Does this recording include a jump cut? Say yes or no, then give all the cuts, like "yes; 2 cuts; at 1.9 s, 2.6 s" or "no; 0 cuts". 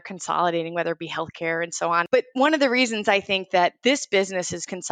yes; 1 cut; at 2.1 s